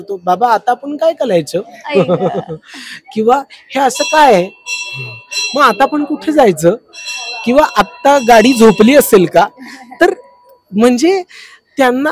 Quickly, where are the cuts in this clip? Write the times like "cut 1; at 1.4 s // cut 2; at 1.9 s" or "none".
none